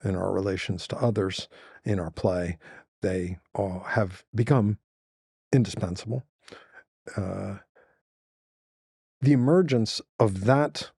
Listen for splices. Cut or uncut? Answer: uncut